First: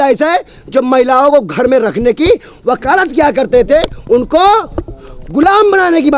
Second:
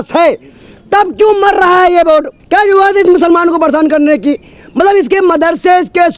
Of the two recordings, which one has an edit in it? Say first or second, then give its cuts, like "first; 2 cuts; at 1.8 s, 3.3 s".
second; 1 cut; at 2.4 s